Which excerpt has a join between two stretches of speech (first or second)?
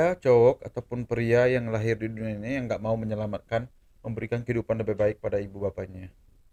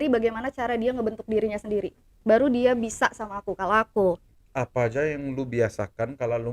second